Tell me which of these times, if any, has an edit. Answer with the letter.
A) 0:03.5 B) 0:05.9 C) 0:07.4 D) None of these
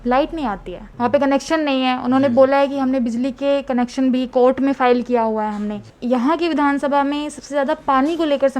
B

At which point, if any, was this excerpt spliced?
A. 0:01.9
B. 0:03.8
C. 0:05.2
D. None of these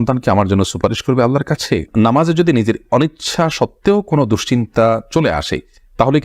A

